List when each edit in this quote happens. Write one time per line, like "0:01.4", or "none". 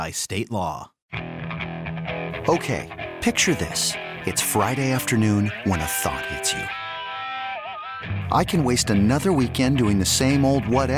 0:00.9